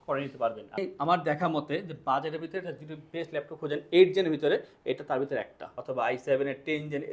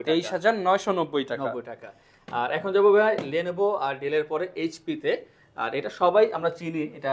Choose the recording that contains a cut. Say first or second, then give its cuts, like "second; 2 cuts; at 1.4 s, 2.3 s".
first; 2 cuts; at 0.8 s, 5.8 s